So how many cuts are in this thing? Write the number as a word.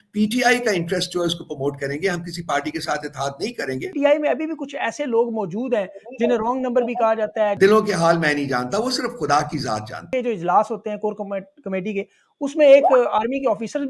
three